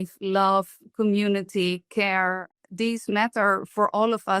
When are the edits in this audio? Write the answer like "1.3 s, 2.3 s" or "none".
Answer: 2.6 s